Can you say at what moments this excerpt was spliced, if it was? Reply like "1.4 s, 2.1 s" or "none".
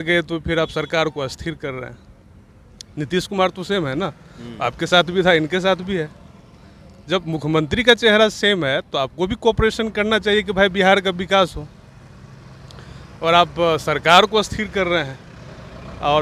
none